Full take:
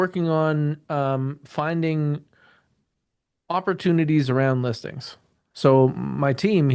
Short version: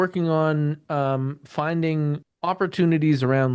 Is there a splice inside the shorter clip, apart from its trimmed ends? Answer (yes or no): yes